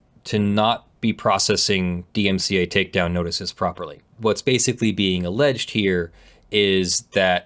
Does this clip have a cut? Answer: yes; 1 cut; at 4.1 s

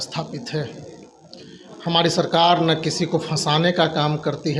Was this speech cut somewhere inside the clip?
no; 0 cuts

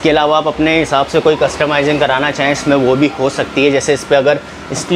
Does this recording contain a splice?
no; 0 cuts

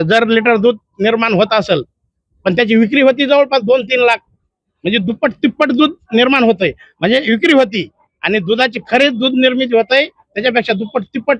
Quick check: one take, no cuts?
yes; 0 cuts

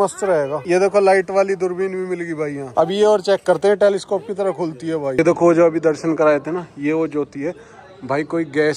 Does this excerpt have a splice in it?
yes; 1 cut; at 5.1 s

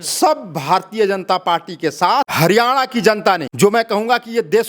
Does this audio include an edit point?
yes; 2 cuts; at 2.3 s, 3.5 s

